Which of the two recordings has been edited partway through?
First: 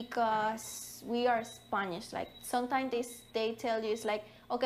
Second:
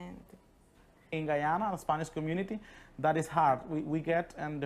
second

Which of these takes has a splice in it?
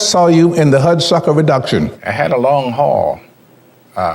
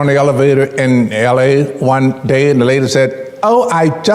first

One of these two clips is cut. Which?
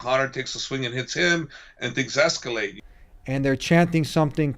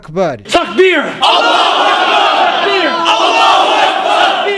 first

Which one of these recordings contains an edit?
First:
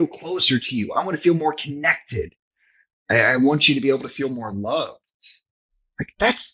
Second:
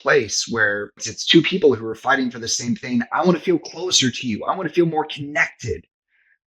second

